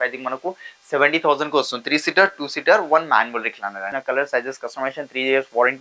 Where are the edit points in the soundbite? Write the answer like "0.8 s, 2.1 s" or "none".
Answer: 3.9 s